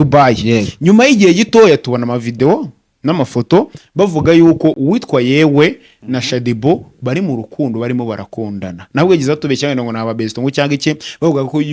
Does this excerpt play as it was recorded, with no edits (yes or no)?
yes